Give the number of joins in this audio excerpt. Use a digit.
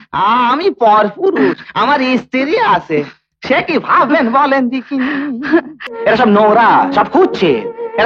1